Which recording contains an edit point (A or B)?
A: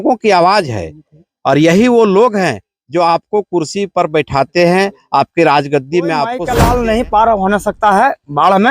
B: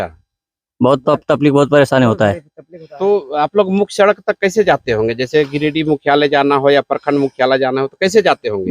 A